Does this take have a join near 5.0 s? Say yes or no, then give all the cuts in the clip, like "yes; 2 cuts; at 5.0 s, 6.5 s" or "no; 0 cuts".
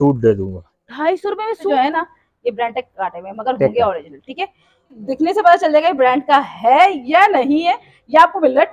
yes; 2 cuts; at 1.7 s, 5.0 s